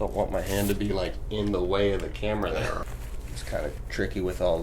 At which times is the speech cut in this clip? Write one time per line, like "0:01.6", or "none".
0:02.9